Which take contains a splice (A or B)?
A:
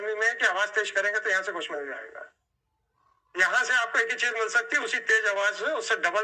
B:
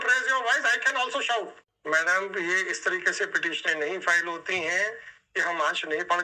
B